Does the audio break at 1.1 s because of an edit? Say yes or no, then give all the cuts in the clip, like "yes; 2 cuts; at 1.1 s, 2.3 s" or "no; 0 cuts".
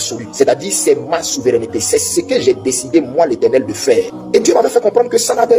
no; 1 cut; at 4.2 s